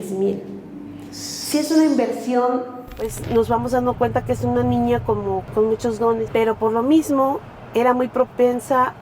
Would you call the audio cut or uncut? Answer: cut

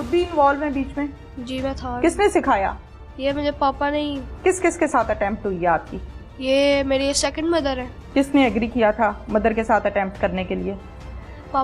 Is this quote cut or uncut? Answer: cut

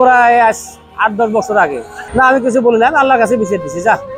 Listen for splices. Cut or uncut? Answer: uncut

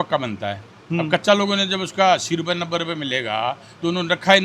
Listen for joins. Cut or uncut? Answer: uncut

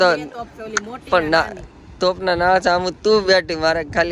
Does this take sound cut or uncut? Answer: uncut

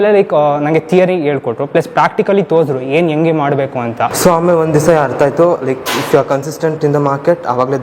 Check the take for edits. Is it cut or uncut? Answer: cut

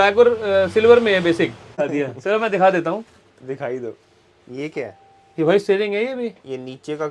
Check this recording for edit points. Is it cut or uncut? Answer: cut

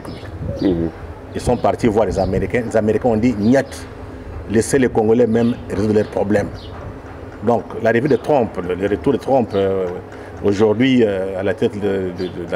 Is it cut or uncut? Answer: uncut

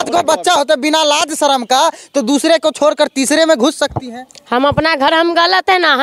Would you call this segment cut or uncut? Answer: cut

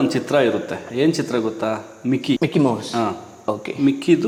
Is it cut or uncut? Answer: uncut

